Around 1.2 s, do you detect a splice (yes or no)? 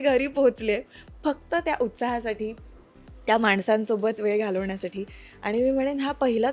no